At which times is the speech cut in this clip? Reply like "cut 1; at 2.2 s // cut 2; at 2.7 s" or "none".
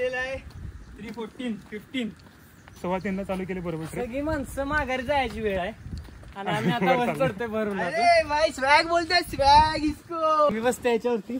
cut 1; at 10.5 s